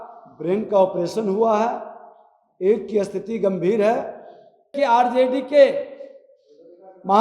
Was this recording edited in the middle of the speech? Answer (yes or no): yes